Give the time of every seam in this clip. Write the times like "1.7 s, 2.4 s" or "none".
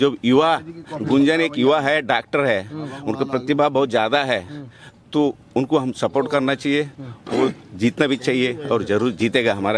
none